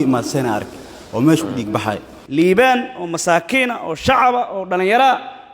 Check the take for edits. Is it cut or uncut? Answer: cut